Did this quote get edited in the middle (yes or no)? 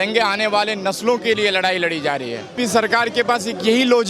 yes